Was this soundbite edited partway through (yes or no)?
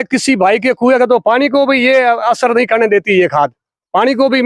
no